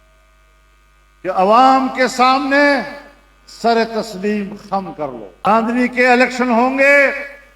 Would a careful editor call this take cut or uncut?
cut